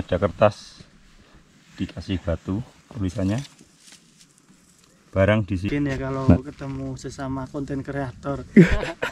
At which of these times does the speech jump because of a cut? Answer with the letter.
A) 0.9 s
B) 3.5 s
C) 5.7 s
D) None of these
C